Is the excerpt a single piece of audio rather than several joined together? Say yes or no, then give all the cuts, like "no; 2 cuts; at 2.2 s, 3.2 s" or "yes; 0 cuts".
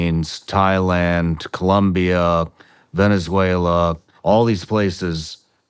no; 1 cut; at 4.1 s